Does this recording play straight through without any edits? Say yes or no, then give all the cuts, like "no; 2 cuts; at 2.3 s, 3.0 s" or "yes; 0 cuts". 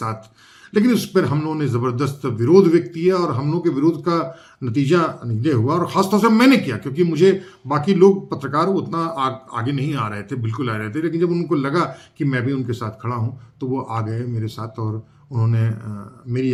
yes; 0 cuts